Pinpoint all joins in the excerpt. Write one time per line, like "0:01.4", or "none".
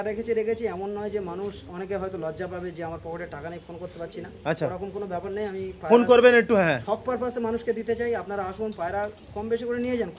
none

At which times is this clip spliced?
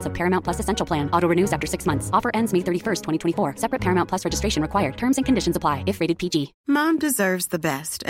0:06.5

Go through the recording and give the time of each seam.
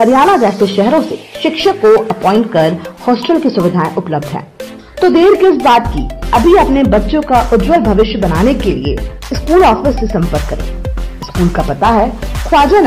none

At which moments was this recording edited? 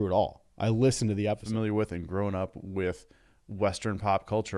0:01.4

